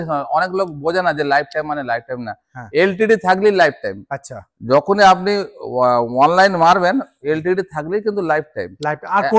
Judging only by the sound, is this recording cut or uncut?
uncut